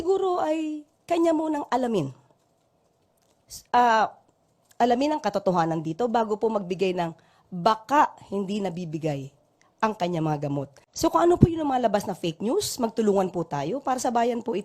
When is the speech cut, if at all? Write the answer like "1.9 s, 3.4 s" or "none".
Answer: 10.8 s